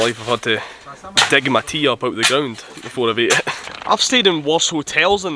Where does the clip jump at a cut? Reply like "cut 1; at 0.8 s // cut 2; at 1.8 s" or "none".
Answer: cut 1; at 3.7 s